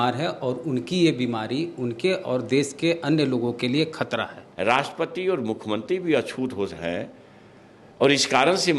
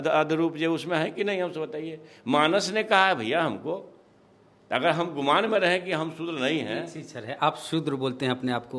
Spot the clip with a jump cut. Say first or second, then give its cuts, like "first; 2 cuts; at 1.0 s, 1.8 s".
first; 1 cut; at 4.4 s